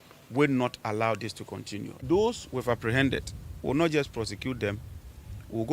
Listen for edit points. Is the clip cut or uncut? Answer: cut